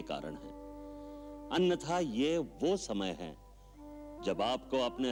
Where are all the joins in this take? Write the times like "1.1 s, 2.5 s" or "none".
none

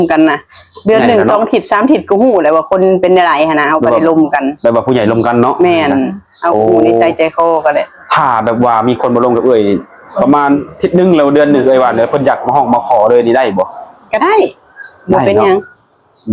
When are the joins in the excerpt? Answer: none

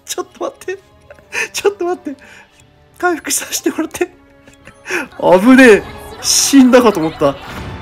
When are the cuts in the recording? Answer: none

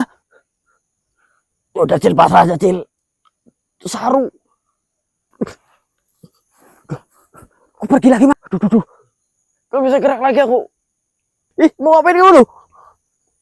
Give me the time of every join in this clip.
8.3 s

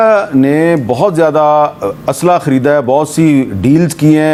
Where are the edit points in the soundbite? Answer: none

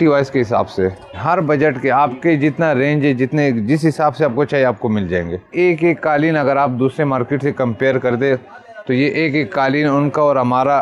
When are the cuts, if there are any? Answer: 1.2 s, 5.5 s

